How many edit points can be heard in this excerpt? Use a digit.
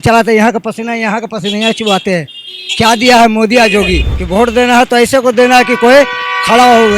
1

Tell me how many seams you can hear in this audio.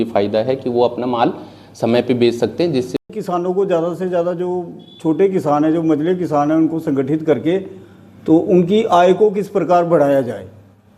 1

